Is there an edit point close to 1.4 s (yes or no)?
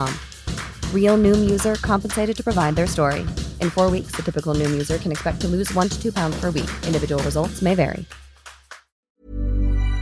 no